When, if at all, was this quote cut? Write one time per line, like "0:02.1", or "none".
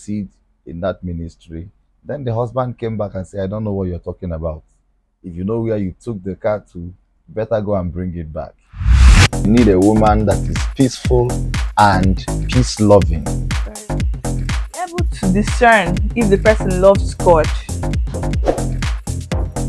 0:09.0
0:18.1